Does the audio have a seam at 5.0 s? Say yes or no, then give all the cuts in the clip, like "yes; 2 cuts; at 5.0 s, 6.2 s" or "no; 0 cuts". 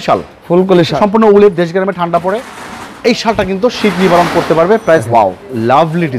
yes; 2 cuts; at 0.9 s, 5.0 s